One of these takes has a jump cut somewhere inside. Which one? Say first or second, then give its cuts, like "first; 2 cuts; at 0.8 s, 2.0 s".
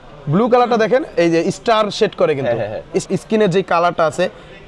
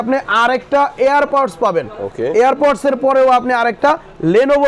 first; 1 cut; at 3.1 s